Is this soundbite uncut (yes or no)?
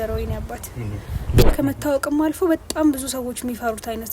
no